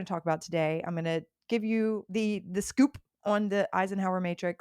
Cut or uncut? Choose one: cut